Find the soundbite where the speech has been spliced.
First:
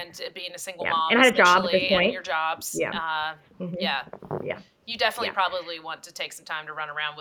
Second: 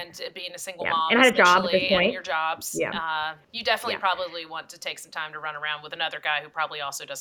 second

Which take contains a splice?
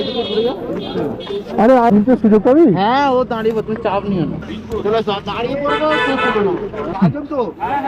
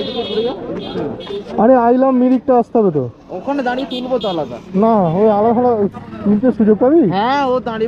first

